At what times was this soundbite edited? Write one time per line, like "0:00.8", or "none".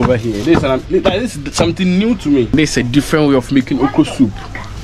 0:02.5